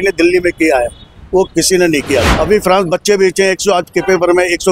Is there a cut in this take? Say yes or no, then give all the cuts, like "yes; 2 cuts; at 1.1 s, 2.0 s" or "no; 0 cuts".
yes; 1 cut; at 2.3 s